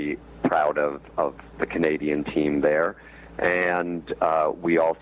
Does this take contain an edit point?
no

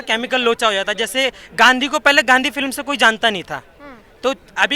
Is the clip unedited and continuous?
no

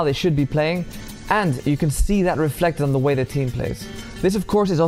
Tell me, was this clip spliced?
no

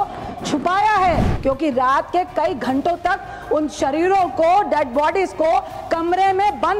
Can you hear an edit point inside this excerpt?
yes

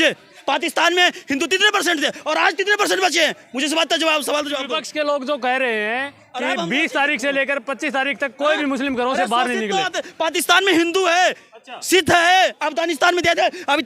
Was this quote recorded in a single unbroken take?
yes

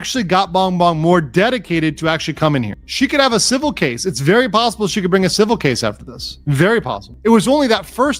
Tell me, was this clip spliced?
yes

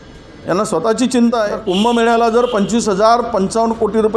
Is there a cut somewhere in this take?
yes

